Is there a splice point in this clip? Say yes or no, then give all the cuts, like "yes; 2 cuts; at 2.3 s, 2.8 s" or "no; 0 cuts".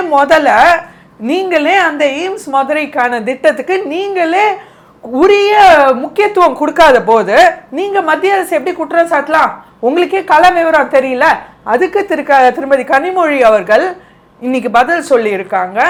no; 0 cuts